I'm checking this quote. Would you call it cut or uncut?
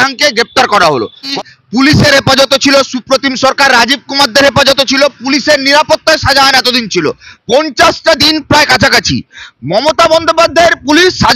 cut